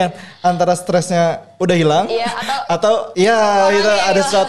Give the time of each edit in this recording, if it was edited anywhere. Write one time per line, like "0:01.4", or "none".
0:03.1